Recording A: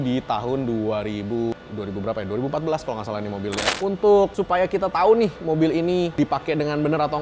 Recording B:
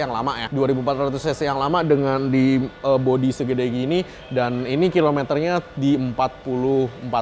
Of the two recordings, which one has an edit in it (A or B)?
A